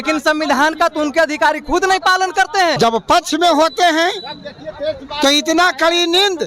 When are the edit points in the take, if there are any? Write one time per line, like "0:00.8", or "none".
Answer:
0:02.8